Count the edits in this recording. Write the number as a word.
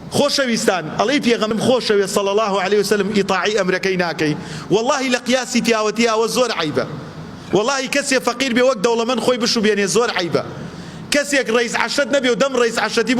one